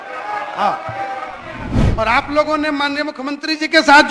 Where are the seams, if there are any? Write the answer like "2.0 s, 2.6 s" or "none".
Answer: 1.8 s